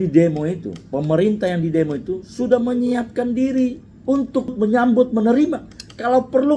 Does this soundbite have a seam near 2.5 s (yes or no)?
no